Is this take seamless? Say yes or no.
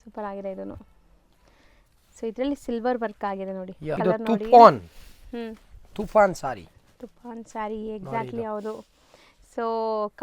no